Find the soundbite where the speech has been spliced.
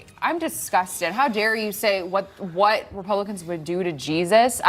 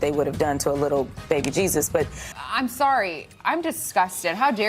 second; 1 cut; at 2.2 s

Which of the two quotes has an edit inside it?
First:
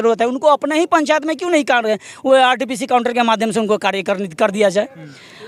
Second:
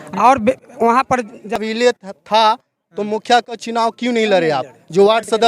second; 1 cut; at 1.6 s

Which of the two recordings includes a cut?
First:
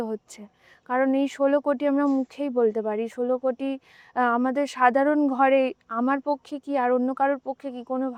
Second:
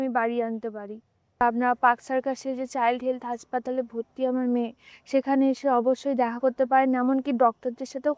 second; 1 cut; at 1.4 s

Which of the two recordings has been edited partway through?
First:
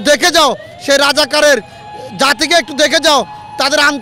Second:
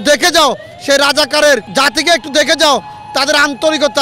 second; 1 cut; at 1.7 s

